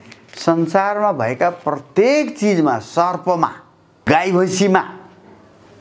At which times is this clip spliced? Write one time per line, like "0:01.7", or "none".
0:04.0